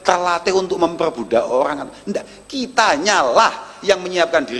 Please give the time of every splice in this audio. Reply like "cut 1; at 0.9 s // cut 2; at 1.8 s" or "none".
none